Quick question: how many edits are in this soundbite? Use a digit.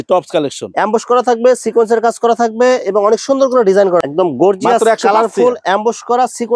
1